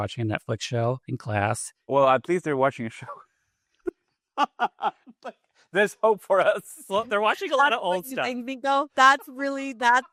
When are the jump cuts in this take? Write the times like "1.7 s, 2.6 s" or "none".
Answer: none